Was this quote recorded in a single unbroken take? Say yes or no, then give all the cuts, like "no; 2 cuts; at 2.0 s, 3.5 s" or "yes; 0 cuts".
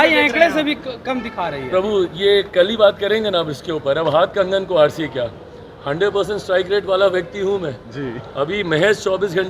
yes; 0 cuts